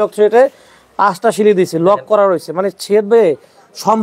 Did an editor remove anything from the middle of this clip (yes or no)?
no